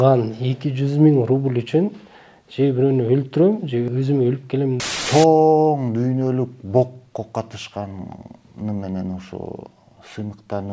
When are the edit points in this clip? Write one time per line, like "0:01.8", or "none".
0:03.9
0:04.8